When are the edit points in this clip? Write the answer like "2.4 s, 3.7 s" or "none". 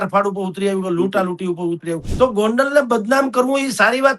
2.1 s